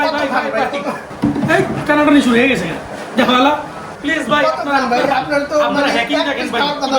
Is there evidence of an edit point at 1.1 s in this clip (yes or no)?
yes